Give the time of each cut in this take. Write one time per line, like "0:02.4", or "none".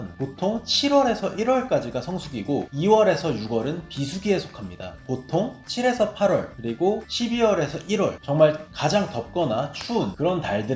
0:04.9